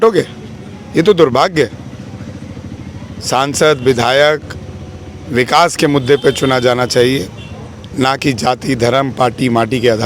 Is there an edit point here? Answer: no; 0 cuts

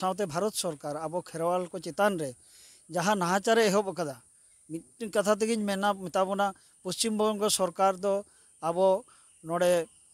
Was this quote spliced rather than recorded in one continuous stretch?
no; 0 cuts

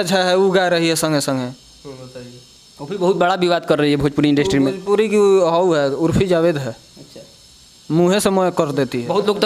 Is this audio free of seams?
yes; 0 cuts

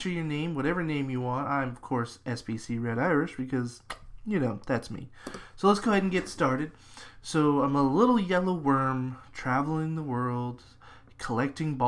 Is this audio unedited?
no; 1 cut; at 4.6 s

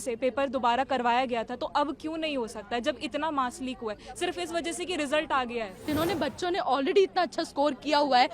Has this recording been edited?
yes; 1 cut; at 5.9 s

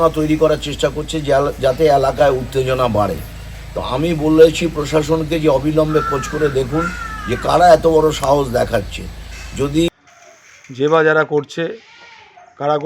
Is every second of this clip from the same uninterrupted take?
no; 1 cut; at 9.9 s

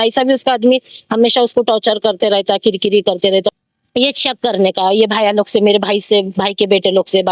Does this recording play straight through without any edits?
no; 1 cut; at 3.5 s

